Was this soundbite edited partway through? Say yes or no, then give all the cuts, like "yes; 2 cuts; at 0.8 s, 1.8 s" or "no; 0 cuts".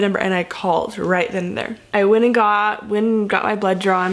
yes; 1 cut; at 1.8 s